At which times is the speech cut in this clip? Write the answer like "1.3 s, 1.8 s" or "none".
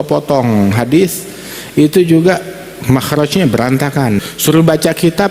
0.8 s, 4.3 s

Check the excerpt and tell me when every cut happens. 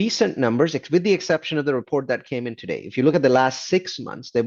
none

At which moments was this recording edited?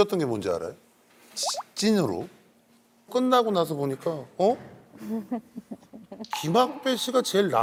none

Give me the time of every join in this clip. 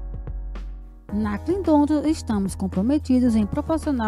1.1 s

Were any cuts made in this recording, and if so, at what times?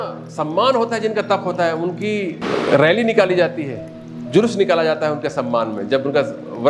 2.4 s

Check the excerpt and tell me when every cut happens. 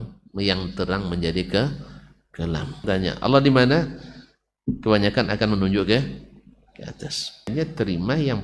2.8 s, 7.5 s

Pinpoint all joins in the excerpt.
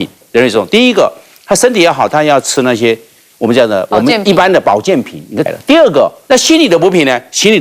5.5 s, 6.2 s

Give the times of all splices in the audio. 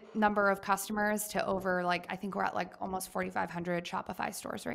none

